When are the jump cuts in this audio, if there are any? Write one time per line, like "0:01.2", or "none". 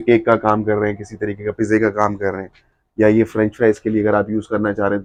none